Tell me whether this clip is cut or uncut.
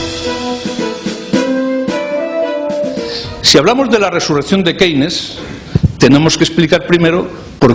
cut